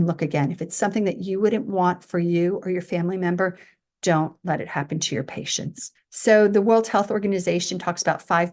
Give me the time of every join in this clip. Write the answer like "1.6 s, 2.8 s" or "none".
none